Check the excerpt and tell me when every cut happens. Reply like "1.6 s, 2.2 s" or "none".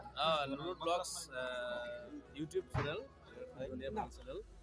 none